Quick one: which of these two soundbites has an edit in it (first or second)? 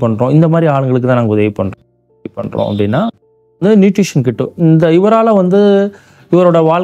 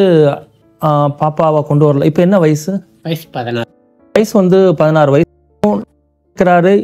second